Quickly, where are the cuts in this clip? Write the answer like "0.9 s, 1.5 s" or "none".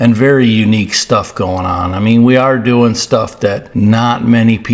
3.6 s